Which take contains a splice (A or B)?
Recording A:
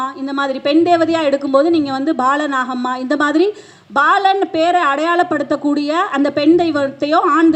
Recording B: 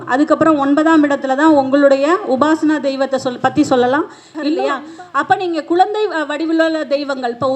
B